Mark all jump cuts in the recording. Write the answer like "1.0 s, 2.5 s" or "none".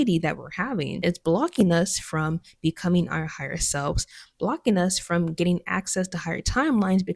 0.9 s